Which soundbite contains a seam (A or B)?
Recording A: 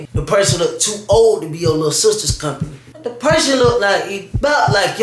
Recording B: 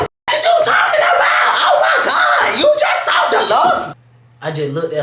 B